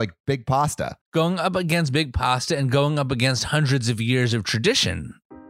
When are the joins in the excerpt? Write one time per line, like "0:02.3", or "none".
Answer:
0:00.9